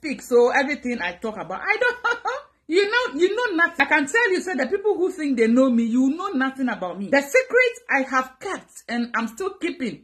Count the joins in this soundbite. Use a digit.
2